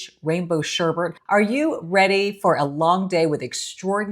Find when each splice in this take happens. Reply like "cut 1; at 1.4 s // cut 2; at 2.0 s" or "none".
cut 1; at 1.2 s

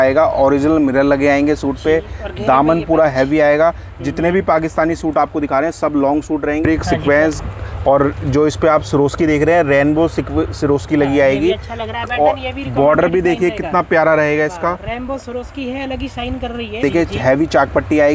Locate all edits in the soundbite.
cut 1; at 6.6 s // cut 2; at 16.8 s

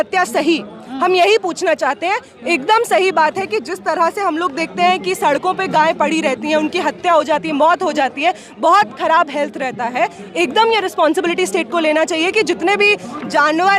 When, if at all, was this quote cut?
none

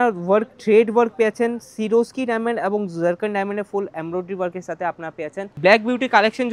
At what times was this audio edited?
cut 1; at 5.4 s

